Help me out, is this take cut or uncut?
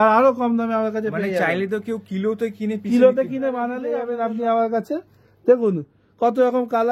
cut